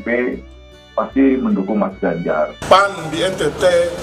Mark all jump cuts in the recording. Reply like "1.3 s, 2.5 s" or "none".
2.6 s